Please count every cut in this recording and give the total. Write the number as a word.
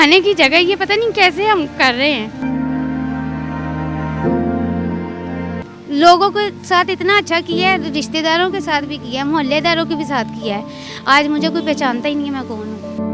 one